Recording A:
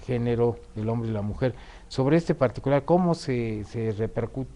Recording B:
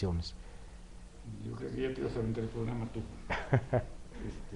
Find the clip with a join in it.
A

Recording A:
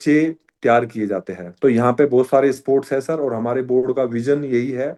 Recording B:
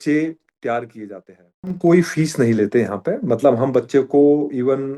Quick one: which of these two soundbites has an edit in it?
B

